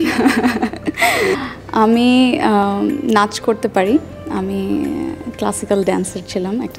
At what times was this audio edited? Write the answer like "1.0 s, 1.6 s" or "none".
1.3 s

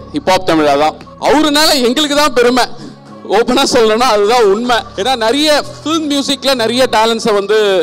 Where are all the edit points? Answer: 1.1 s, 4.9 s

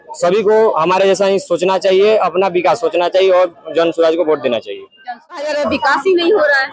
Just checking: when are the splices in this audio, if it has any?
5.4 s

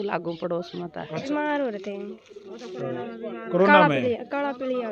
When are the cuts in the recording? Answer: 1.2 s

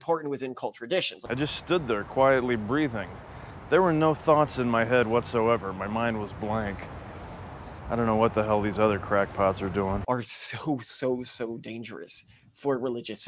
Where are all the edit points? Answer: 1.2 s, 10.0 s

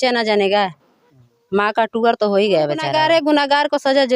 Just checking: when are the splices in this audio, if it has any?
2.9 s

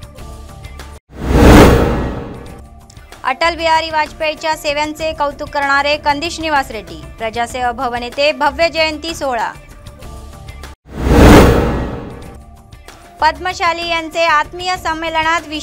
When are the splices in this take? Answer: 0.9 s

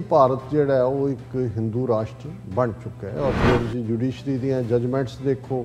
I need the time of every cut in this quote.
3.4 s

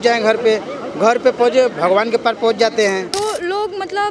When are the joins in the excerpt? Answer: 3.1 s

